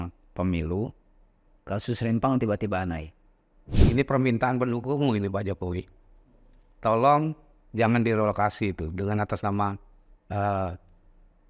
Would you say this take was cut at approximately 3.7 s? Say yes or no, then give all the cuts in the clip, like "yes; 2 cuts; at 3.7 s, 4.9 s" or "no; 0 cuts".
yes; 1 cut; at 3.7 s